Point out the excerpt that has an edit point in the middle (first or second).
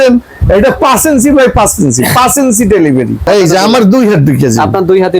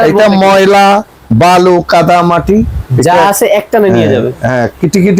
first